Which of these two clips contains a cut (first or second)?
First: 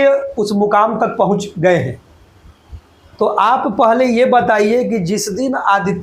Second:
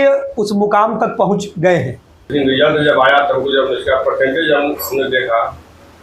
second